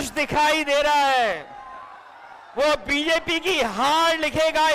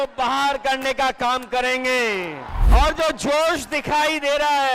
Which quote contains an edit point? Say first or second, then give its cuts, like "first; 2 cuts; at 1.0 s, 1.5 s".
second; 1 cut; at 2.5 s